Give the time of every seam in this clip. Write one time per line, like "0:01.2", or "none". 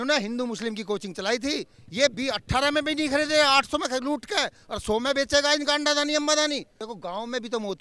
0:01.8
0:06.8